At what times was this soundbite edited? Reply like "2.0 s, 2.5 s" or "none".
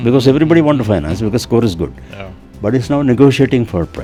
none